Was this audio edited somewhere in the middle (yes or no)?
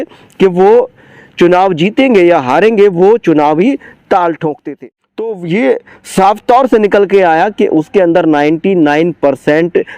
yes